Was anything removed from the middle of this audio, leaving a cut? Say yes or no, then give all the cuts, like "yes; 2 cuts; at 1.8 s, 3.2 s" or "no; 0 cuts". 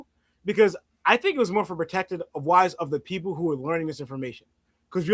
no; 0 cuts